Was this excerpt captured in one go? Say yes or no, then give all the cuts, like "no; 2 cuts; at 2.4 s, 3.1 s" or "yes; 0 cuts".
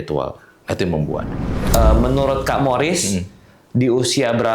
no; 1 cut; at 1.5 s